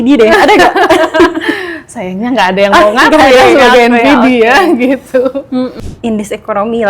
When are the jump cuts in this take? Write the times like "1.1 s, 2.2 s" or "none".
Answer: 5.8 s